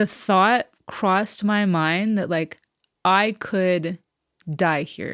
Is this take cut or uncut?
uncut